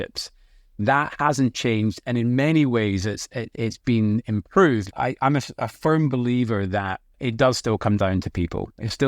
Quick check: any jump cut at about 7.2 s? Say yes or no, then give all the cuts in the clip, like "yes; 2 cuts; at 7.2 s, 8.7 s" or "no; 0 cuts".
yes; 2 cuts; at 4.9 s, 7.2 s